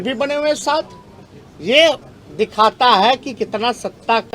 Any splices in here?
no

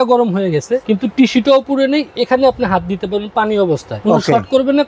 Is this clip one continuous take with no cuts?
no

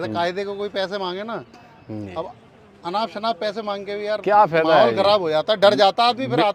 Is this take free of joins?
yes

